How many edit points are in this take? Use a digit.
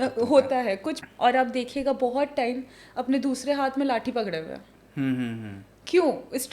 1